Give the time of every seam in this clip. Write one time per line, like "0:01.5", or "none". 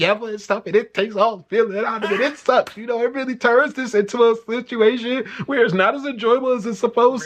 none

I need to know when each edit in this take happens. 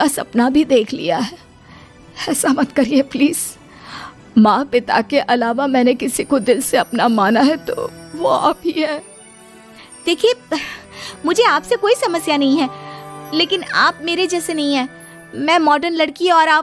none

